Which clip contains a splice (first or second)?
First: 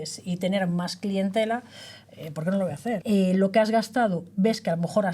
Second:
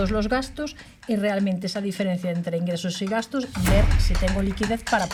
first